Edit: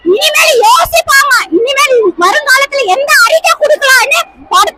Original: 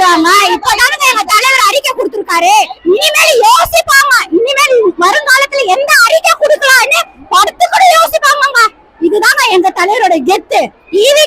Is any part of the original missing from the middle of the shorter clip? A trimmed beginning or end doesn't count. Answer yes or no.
no